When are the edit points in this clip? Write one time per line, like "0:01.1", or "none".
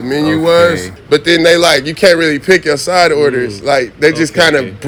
none